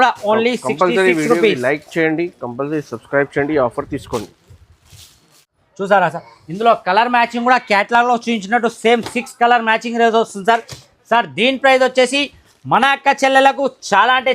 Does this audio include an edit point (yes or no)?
yes